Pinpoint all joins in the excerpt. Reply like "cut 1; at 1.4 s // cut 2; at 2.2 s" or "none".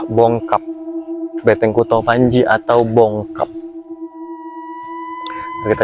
cut 1; at 3.4 s // cut 2; at 5.0 s